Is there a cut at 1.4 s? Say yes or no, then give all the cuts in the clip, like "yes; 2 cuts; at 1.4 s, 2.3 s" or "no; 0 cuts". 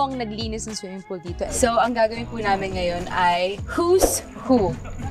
yes; 1 cut; at 1.4 s